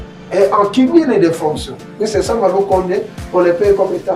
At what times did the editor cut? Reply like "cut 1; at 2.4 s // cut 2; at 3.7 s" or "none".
none